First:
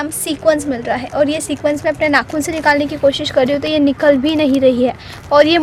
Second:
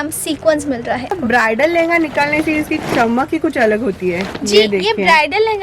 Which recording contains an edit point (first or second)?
second